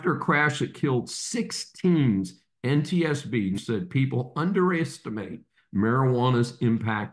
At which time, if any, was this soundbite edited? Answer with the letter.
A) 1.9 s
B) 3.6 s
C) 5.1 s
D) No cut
B